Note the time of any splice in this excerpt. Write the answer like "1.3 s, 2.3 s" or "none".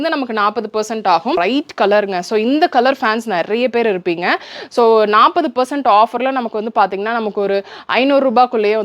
1.4 s